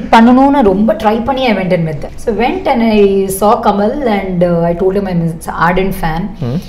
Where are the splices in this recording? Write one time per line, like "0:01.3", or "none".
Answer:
none